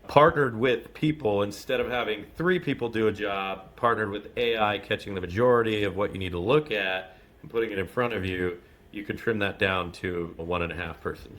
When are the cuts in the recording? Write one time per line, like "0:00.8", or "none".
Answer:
0:10.4